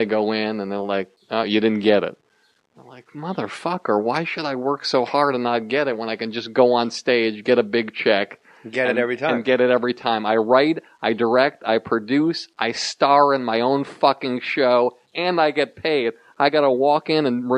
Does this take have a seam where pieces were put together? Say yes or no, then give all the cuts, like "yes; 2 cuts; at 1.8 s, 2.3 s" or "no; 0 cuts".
yes; 1 cut; at 7.0 s